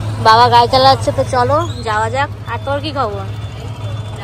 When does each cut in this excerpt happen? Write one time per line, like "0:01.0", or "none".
none